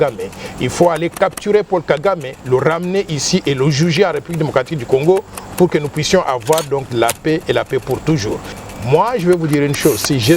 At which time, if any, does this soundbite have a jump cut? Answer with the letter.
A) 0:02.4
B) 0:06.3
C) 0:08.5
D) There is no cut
C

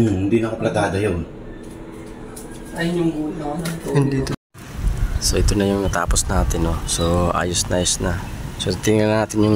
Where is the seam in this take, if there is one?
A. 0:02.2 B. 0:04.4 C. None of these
B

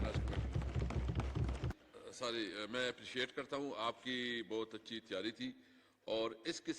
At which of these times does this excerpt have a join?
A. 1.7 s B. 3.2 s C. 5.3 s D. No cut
A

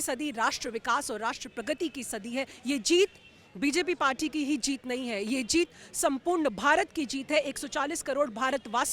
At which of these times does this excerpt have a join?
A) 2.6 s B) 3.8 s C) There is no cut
A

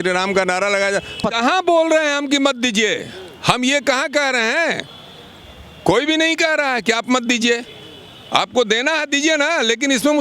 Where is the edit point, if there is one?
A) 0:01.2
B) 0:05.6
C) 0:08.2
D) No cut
A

